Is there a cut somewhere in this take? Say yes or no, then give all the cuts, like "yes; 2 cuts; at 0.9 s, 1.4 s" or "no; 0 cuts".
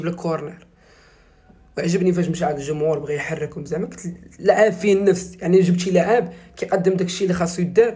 no; 0 cuts